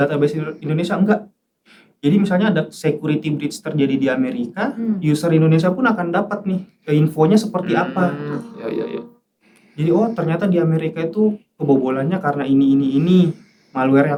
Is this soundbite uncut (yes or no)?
yes